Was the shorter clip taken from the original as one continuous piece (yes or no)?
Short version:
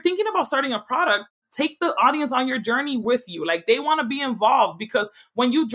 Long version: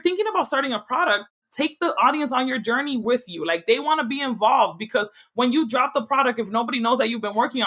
yes